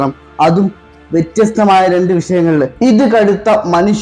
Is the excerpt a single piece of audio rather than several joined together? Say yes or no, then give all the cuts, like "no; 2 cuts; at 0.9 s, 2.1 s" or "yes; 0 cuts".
no; 1 cut; at 2.7 s